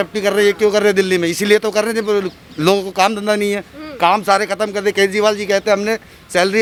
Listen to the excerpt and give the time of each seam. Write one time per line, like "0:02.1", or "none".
none